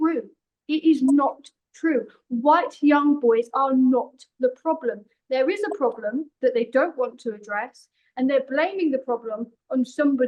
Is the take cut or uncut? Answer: uncut